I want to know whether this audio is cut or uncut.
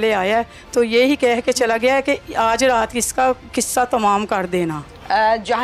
uncut